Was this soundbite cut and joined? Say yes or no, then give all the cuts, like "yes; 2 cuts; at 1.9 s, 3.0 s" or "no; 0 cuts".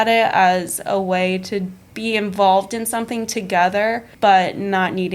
yes; 2 cuts; at 1.8 s, 4.1 s